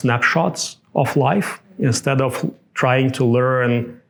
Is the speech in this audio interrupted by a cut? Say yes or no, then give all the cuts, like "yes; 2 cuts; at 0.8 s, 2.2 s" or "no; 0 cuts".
no; 0 cuts